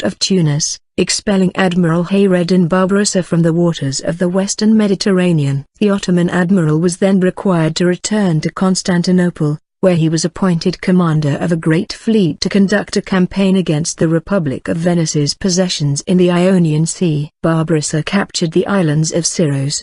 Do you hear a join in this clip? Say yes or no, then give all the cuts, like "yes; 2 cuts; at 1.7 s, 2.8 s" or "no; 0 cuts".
yes; 1 cut; at 7.7 s